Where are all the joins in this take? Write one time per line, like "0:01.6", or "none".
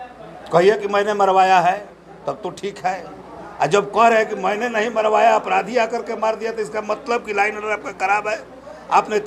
none